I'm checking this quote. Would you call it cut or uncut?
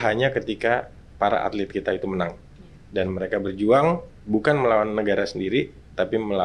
uncut